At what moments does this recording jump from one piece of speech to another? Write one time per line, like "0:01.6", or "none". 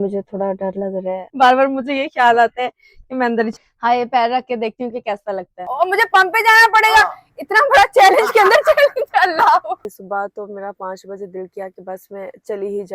0:01.3
0:03.5
0:05.5
0:09.8